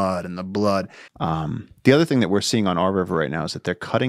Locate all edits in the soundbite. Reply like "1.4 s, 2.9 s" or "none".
1.0 s